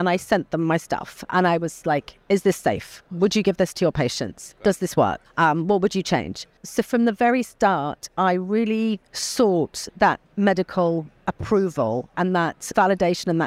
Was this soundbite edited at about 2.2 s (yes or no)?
no